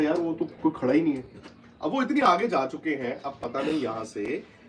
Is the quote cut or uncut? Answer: uncut